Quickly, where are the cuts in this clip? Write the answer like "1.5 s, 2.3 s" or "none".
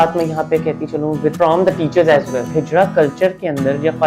1.3 s, 2.6 s